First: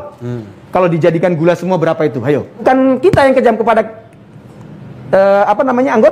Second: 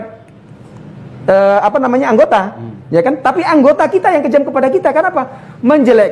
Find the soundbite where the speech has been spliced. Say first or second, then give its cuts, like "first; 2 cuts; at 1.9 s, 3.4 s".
first; 1 cut; at 2.6 s